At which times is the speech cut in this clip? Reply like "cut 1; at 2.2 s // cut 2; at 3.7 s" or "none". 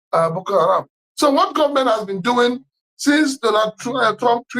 cut 1; at 1.0 s